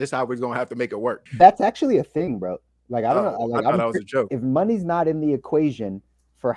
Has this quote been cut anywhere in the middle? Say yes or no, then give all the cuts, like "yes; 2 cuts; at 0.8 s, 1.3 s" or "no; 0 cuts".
yes; 2 cuts; at 1.3 s, 4.3 s